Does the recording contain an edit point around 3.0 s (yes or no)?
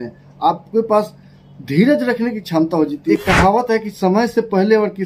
yes